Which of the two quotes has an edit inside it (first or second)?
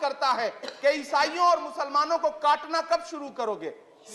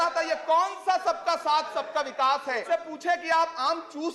second